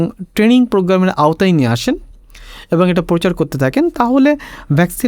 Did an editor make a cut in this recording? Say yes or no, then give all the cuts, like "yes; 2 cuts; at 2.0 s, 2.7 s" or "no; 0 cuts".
no; 0 cuts